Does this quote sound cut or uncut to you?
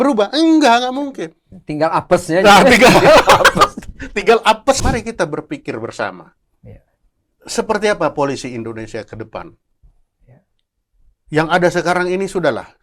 cut